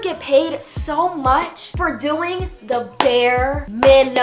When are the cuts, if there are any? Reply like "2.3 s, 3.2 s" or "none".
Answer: none